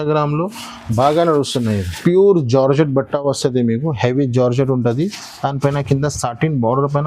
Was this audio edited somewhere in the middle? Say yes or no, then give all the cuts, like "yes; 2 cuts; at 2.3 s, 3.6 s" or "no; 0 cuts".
yes; 1 cut; at 2.0 s